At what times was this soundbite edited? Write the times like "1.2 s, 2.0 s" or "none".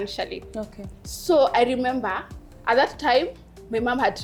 none